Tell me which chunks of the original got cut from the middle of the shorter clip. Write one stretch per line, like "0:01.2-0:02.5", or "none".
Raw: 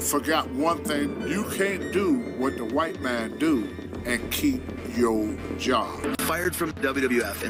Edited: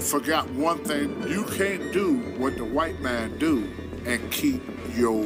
none